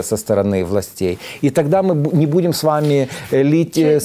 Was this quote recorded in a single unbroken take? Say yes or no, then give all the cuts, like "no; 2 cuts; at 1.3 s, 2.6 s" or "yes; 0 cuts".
yes; 0 cuts